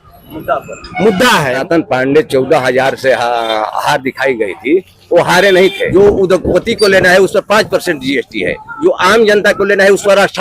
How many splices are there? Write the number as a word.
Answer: two